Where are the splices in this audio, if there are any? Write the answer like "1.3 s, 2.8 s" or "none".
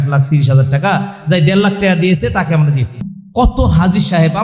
3.0 s